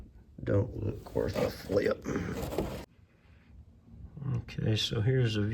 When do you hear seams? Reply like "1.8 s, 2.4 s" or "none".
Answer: 2.8 s